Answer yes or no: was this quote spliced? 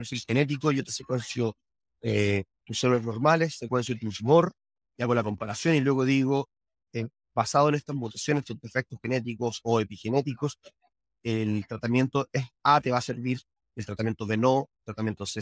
no